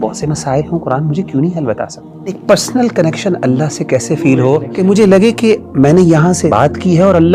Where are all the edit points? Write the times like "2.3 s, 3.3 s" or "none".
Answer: 2.4 s, 4.7 s, 6.5 s